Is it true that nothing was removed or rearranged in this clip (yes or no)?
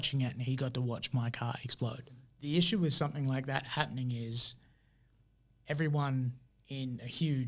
no